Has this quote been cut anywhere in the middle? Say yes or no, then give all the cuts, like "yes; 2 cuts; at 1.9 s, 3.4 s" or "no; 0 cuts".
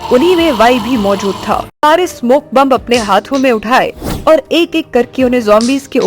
yes; 1 cut; at 1.8 s